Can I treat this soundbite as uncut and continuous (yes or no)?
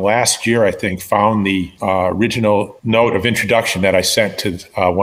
no